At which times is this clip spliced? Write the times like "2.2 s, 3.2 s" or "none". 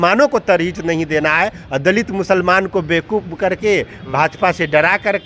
none